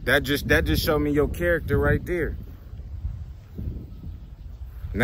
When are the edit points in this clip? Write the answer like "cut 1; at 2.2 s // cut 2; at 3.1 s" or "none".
none